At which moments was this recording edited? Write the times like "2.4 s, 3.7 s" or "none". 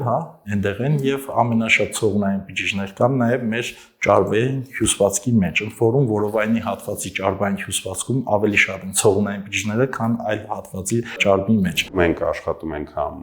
11.9 s